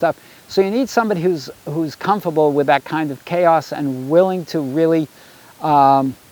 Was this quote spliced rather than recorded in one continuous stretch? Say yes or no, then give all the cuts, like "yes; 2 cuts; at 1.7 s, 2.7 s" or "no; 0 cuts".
no; 0 cuts